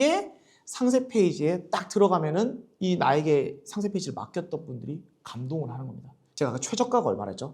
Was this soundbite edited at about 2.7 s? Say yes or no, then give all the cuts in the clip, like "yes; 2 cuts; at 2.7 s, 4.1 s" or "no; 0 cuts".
no; 1 cut; at 6.2 s